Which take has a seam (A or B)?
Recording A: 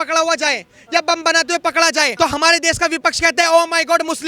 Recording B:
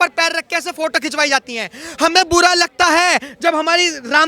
A